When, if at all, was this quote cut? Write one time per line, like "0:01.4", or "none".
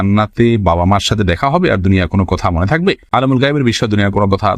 none